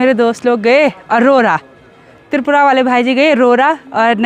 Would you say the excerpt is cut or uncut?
uncut